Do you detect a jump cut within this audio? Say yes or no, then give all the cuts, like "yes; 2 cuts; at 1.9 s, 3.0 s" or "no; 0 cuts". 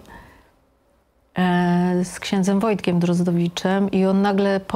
no; 0 cuts